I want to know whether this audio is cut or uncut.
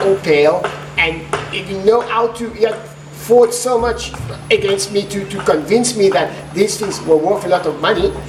uncut